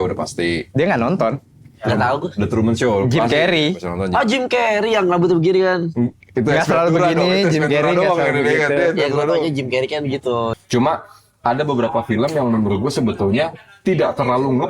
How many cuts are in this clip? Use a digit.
1